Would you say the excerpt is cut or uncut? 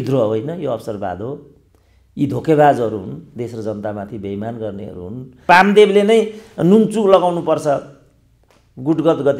cut